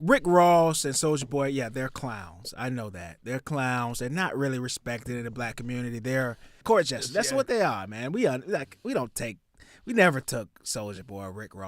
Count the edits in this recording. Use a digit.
1